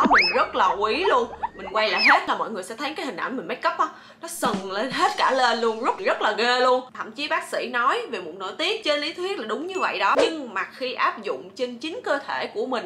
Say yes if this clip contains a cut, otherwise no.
yes